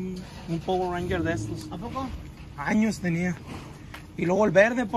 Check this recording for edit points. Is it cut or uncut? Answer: uncut